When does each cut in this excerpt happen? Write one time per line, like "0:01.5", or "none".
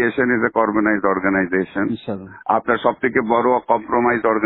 none